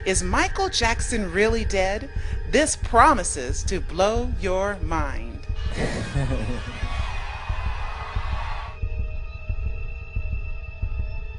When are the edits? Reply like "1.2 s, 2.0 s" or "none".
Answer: 1.7 s